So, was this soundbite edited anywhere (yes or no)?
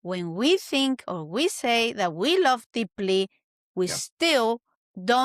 no